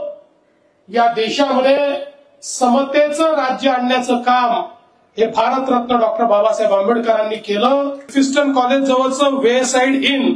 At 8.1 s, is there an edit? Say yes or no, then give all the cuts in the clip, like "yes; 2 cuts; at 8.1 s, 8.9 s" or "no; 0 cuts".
yes; 1 cut; at 8.1 s